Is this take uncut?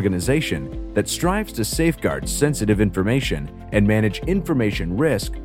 yes; 0 cuts

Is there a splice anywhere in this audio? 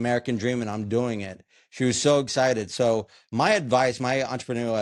no; 0 cuts

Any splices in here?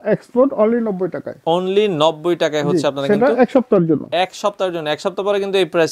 no; 0 cuts

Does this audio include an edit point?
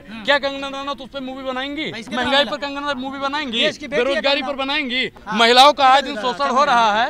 yes; 2 cuts; at 2.0 s, 5.2 s

